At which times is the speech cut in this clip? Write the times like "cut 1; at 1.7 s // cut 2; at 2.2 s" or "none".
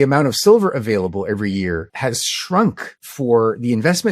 cut 1; at 1.9 s // cut 2; at 2.9 s